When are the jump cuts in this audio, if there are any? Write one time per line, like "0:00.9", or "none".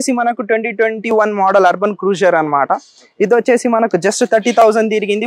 none